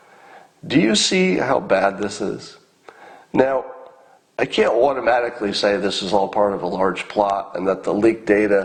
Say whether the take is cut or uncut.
uncut